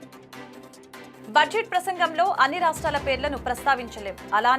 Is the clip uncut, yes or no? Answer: no